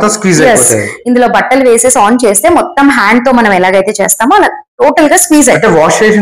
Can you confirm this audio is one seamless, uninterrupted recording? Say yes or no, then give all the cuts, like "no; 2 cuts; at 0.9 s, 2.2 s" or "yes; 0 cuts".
yes; 0 cuts